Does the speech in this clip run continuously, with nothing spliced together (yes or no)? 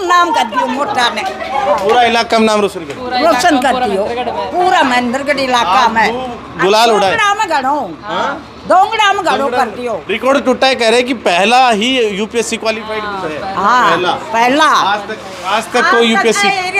yes